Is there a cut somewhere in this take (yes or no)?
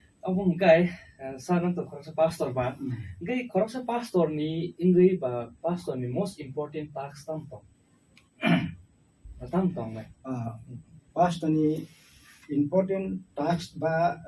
no